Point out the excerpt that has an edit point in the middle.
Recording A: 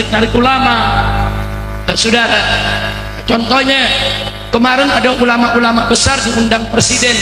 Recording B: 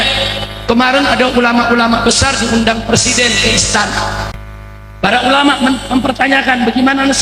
B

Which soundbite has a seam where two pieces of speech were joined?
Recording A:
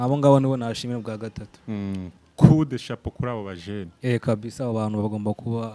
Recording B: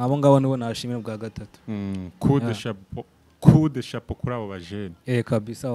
A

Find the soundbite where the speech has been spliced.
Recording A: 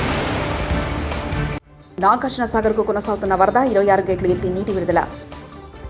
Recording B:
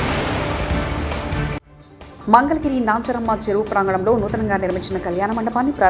B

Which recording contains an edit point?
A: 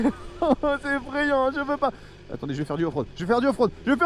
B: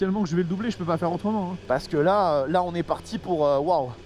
B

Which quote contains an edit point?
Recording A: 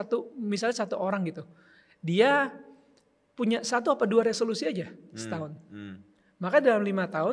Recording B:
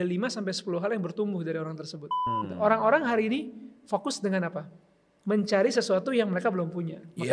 B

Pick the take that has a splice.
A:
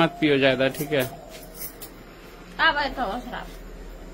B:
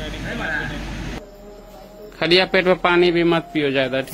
B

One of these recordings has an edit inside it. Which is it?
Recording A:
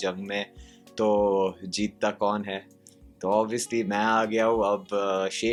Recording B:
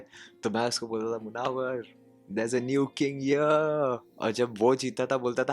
B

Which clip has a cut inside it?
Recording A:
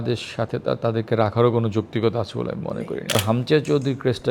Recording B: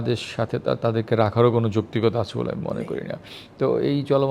A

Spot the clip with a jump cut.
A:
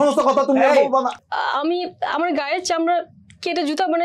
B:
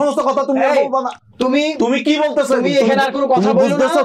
A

